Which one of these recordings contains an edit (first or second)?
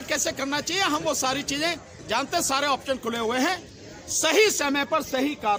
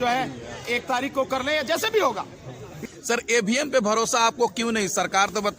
second